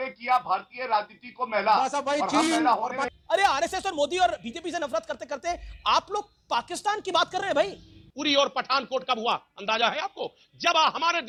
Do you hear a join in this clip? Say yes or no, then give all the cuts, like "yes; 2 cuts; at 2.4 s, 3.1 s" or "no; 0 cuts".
no; 0 cuts